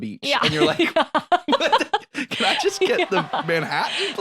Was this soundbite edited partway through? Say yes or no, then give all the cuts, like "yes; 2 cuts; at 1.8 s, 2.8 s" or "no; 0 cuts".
no; 0 cuts